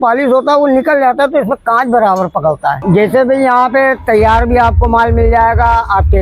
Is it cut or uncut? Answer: cut